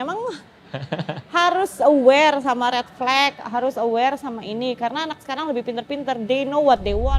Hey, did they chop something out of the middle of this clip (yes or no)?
no